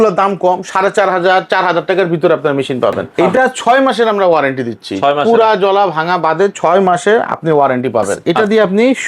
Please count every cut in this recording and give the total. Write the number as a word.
two